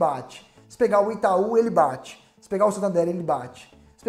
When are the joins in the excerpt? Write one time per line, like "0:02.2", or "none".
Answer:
none